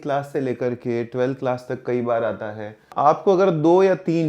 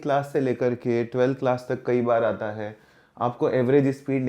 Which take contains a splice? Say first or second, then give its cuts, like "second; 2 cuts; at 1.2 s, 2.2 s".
first; 1 cut; at 2.8 s